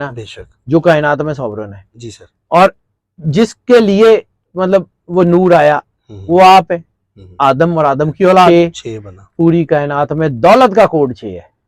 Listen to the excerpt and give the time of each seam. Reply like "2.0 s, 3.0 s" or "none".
8.5 s